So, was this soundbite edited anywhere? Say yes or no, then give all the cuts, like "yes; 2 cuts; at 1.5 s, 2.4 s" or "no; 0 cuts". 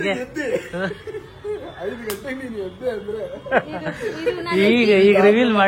no; 0 cuts